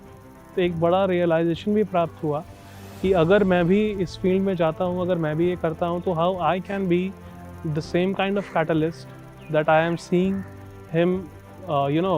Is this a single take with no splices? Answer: yes; 0 cuts

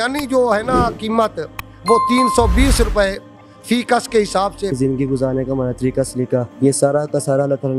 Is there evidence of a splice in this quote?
yes; 1 cut; at 4.7 s

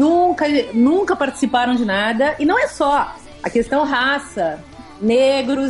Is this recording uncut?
yes; 0 cuts

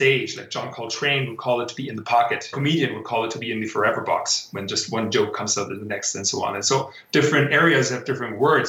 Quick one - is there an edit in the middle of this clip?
yes; 1 cut; at 2.5 s

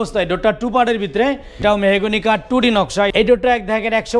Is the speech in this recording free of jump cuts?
no; 2 cuts; at 1.6 s, 3.1 s

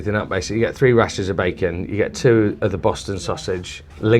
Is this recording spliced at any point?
no; 0 cuts

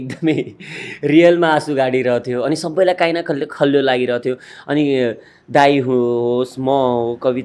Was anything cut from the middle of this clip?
no; 0 cuts

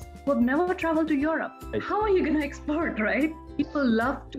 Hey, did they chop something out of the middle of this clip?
yes; 2 cuts; at 1.6 s, 3.4 s

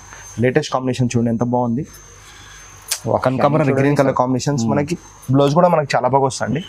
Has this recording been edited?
no; 0 cuts

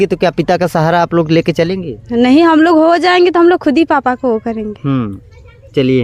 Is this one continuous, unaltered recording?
yes; 0 cuts

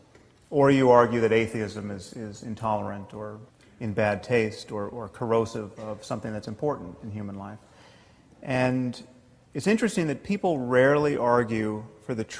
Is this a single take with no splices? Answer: yes; 0 cuts

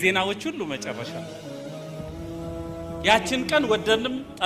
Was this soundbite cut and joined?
yes; 2 cuts; at 1.4 s, 3.0 s

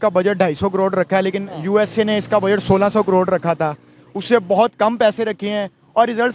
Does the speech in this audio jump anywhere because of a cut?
no; 0 cuts

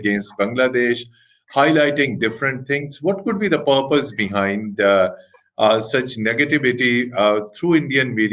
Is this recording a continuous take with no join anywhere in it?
yes; 0 cuts

